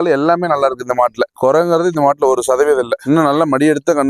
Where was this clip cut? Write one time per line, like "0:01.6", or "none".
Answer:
0:03.0